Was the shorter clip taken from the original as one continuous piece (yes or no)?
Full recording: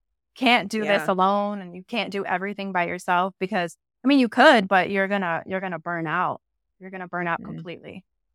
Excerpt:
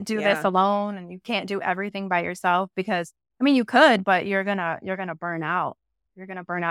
yes